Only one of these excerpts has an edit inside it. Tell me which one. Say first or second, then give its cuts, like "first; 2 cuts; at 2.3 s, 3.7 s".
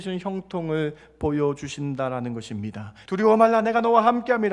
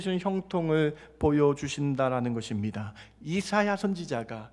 first; 1 cut; at 2.9 s